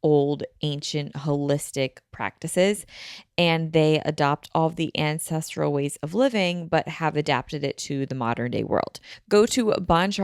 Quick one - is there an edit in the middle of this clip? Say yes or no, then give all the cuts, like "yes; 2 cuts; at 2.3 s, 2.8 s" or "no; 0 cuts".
yes; 1 cut; at 9.1 s